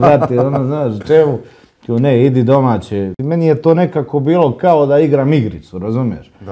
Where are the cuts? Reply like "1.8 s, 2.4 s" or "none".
3.2 s